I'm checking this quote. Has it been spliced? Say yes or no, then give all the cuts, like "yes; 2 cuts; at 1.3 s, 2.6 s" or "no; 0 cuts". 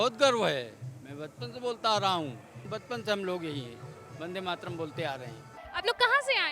no; 0 cuts